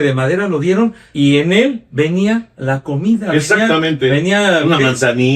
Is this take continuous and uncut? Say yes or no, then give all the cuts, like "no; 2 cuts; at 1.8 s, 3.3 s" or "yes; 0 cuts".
no; 2 cuts; at 1.0 s, 2.5 s